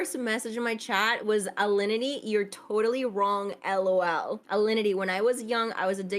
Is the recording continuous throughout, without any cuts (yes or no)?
yes